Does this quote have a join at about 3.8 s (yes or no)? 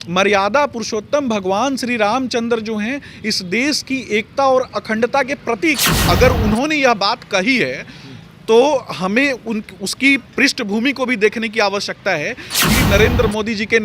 no